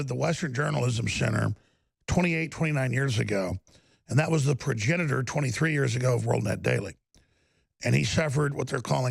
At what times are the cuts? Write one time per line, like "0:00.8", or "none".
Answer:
none